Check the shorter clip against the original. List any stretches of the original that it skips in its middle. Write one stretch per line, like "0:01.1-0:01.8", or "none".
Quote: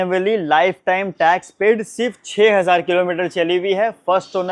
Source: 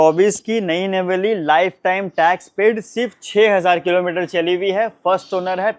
none